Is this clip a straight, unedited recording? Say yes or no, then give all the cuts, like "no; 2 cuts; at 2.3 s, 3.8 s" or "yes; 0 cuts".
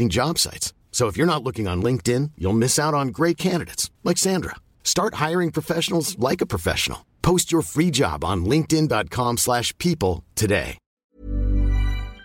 no; 1 cut; at 11.2 s